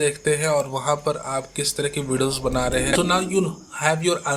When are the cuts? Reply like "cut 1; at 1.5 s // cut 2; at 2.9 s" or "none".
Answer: cut 1; at 2.9 s